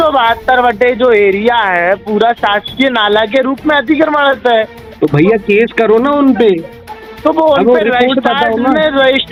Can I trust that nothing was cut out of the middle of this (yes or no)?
yes